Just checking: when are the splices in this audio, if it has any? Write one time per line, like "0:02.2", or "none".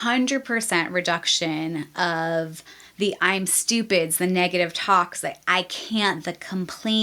none